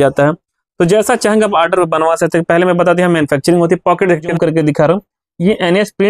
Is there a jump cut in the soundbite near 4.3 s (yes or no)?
yes